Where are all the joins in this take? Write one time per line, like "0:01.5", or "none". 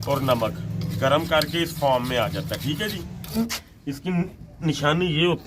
0:03.4